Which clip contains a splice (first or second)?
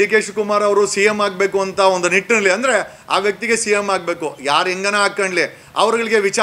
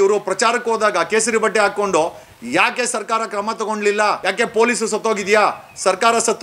second